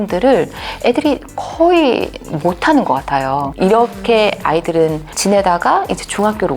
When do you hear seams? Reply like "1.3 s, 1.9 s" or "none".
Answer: 3.5 s, 5.1 s